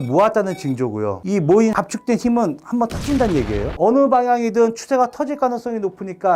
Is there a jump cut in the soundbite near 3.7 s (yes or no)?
no